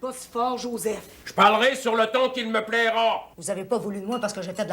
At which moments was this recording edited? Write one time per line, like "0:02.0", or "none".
0:03.3